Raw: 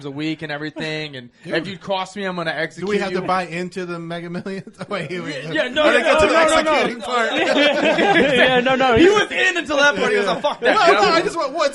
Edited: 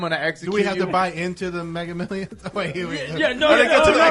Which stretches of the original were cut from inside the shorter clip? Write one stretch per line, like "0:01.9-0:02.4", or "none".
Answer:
none